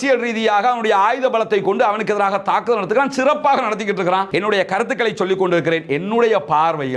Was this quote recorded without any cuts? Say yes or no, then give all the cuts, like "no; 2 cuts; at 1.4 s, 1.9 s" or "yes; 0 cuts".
no; 1 cut; at 4.3 s